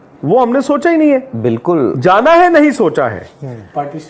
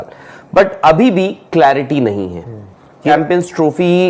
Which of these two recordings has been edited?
second; 1 cut; at 3.1 s

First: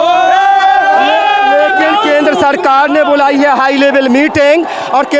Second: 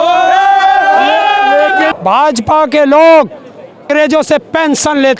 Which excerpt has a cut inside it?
second; 2 cuts; at 1.9 s, 3.9 s

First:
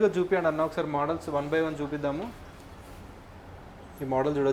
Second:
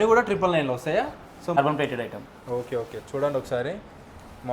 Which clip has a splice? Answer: second; 1 cut; at 1.6 s

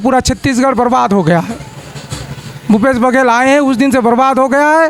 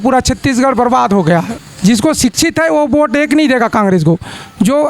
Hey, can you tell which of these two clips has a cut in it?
second; 1 cut; at 1.6 s

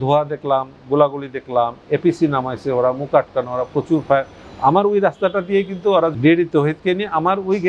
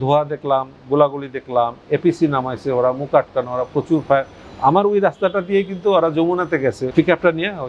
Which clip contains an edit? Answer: first; 1 cut; at 6.1 s

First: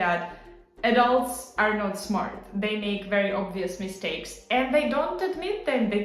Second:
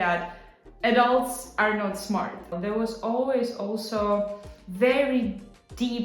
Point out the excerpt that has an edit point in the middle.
second; 1 cut; at 2.5 s

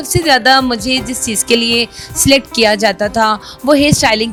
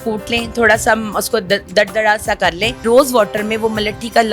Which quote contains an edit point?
second; 1 cut; at 2.8 s

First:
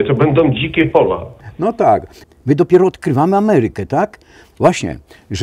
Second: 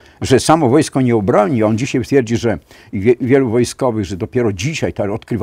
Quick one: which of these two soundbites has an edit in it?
first; 1 cut; at 2.1 s

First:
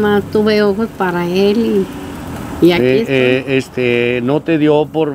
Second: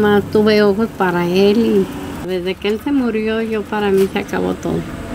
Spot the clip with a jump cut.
second; 1 cut; at 2.2 s

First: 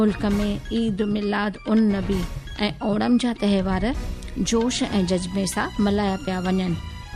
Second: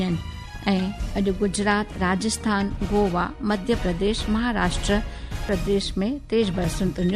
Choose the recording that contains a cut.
second; 1 cut; at 5.5 s

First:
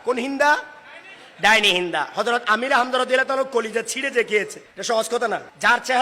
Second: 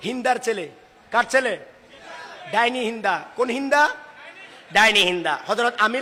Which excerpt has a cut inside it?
first; 2 cuts; at 4.7 s, 5.3 s

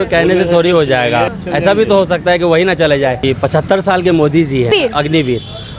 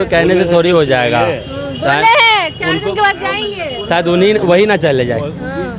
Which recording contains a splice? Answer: first; 3 cuts; at 1.4 s, 3.2 s, 4.7 s

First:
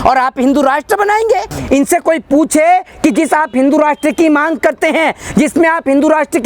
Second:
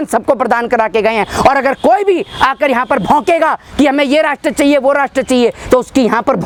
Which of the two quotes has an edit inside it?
first; 1 cut; at 1.5 s

